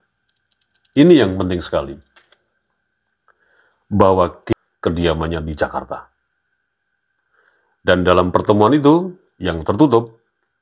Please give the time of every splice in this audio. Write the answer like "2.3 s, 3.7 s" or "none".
4.4 s